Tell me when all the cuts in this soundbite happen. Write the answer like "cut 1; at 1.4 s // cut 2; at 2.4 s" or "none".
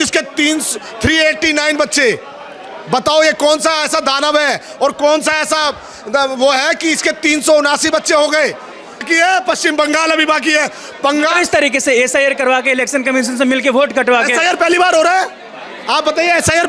cut 1; at 9.0 s